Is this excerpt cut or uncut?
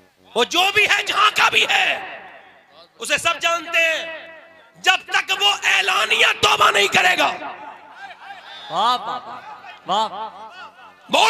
uncut